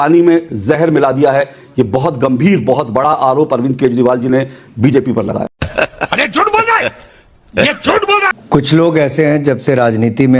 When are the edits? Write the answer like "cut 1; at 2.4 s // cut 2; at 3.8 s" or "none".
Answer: cut 1; at 5.6 s // cut 2; at 8.4 s